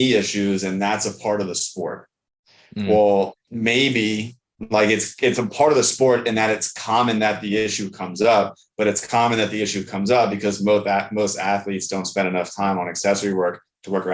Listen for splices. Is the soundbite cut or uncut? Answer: cut